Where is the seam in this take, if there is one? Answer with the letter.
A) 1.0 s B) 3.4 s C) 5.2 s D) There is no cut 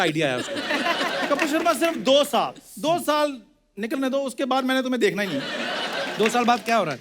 D